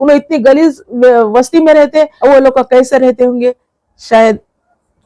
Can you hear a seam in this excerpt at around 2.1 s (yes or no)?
yes